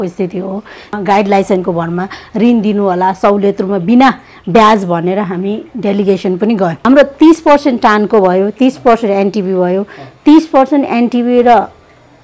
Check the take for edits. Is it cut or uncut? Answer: cut